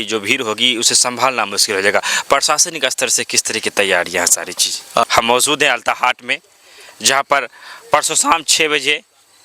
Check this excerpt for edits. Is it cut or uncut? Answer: cut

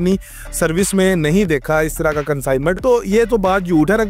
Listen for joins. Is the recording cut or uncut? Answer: cut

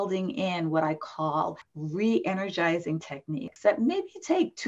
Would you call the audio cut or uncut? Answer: cut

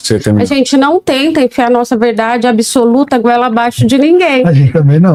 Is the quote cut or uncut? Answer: uncut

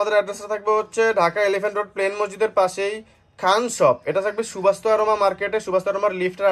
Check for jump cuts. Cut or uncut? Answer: uncut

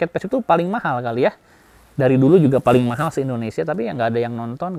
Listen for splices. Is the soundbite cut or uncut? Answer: uncut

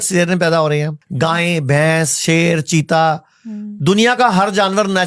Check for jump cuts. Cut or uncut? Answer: cut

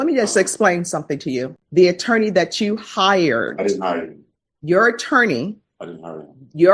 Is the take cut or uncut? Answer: cut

